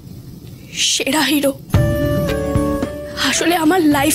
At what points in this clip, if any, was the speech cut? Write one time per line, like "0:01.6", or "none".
0:03.1